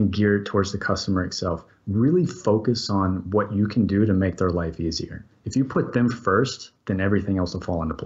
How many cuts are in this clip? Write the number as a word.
one